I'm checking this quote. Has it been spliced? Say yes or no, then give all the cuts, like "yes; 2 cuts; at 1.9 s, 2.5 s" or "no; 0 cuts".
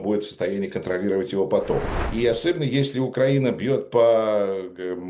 yes; 1 cut; at 2.0 s